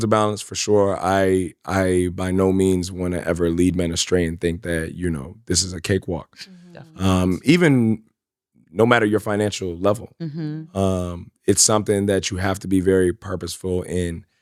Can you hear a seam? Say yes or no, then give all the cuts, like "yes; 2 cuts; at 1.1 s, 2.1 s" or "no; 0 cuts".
no; 0 cuts